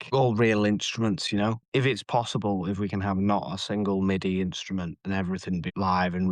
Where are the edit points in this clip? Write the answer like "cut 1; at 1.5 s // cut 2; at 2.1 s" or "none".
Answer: cut 1; at 1.6 s